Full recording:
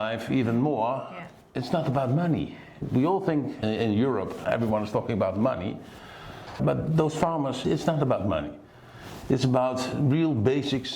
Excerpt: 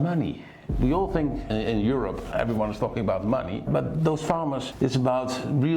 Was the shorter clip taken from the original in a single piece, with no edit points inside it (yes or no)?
no